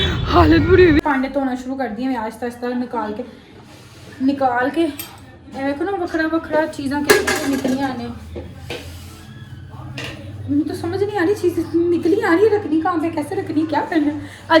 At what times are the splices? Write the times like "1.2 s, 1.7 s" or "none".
1.0 s